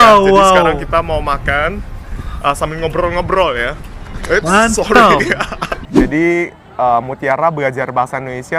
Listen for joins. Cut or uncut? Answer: cut